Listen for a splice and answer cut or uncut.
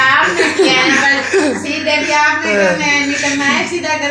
uncut